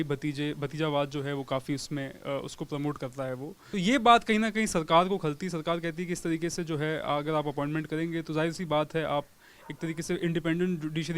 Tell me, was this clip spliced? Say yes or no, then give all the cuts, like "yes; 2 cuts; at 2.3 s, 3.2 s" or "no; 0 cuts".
yes; 1 cut; at 3.5 s